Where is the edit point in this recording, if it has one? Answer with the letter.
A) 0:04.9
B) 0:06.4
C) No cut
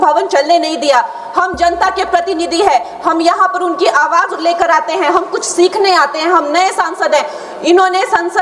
C